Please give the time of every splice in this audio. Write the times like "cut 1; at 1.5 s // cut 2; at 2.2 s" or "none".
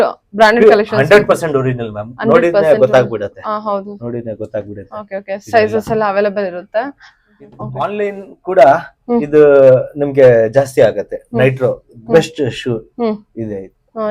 cut 1; at 7.9 s